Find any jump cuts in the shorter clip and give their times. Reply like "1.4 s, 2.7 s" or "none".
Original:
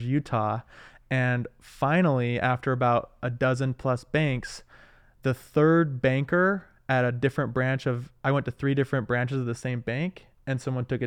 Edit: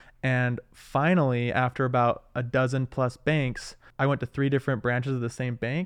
3.8 s